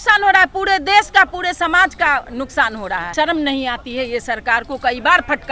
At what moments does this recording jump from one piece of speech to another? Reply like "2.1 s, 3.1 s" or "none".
3.1 s